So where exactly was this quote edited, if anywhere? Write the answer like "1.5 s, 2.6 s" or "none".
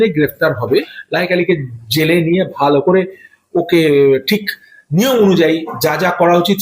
1.0 s